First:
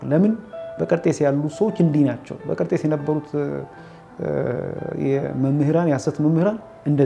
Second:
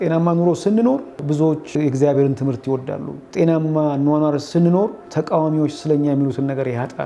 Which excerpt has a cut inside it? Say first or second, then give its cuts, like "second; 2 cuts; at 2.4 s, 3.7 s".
second; 3 cuts; at 1.6 s, 3.2 s, 4.7 s